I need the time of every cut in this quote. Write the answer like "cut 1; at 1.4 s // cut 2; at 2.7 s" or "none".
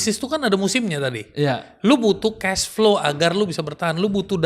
none